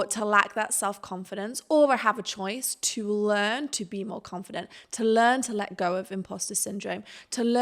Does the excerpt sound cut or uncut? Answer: uncut